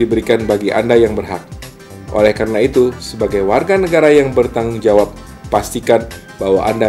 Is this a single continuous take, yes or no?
yes